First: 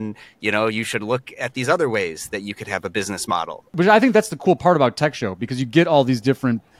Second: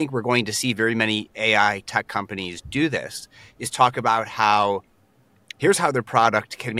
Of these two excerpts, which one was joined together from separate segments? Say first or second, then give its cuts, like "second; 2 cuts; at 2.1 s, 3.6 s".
first; 1 cut; at 3.7 s